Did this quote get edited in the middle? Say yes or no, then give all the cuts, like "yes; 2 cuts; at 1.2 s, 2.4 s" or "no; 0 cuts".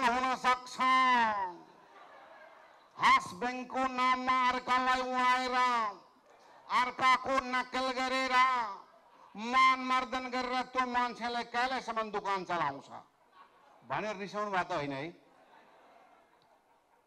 no; 0 cuts